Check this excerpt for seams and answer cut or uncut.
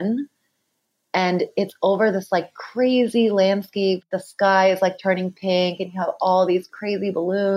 cut